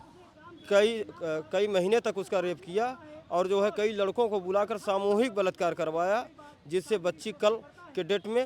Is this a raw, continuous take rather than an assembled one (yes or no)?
yes